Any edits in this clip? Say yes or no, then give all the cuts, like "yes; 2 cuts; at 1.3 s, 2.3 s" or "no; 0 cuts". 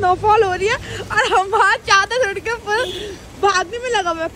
no; 0 cuts